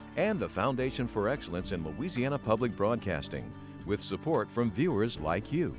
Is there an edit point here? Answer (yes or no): no